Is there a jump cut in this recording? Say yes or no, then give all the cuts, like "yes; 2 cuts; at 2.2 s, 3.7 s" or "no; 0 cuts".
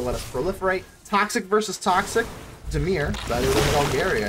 yes; 1 cut; at 0.9 s